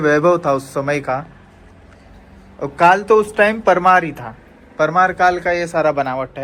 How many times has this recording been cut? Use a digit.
0